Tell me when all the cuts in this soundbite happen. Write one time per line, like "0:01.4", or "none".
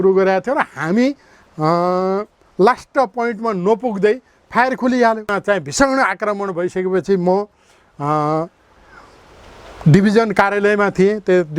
0:05.3